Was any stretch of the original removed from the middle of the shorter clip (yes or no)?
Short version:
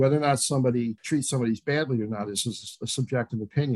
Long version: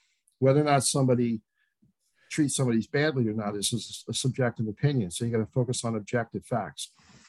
yes